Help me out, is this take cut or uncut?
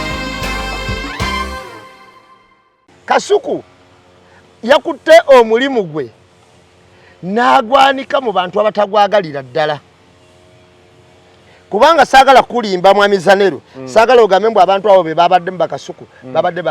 cut